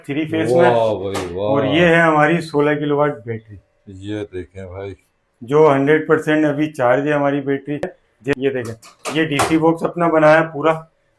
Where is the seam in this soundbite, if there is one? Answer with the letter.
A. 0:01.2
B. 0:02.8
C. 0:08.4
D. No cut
C